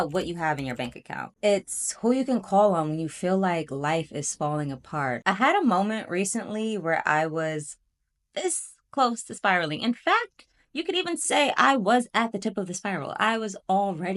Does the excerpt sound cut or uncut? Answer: cut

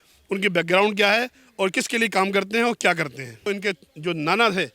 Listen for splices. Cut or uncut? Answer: cut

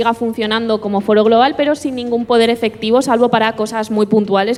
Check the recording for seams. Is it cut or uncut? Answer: uncut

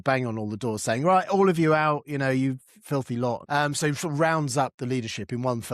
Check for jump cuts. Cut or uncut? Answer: cut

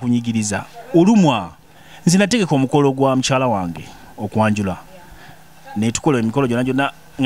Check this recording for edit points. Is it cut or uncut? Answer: uncut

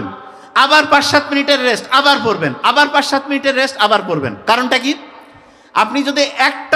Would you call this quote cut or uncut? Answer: uncut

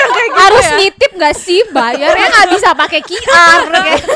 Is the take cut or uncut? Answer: uncut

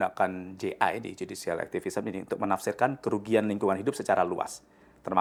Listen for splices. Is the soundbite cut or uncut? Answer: uncut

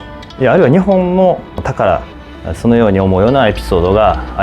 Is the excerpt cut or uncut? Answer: cut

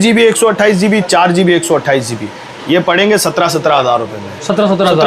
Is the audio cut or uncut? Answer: uncut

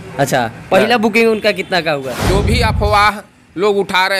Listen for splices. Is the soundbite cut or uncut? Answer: cut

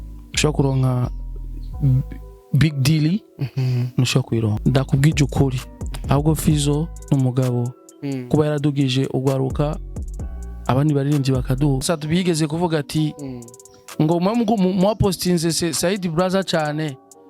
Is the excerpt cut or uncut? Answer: cut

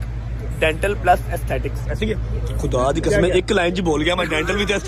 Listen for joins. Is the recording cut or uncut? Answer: uncut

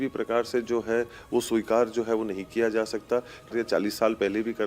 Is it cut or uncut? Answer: cut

